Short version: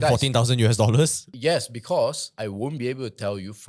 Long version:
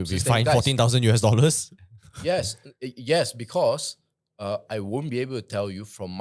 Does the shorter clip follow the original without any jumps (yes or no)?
no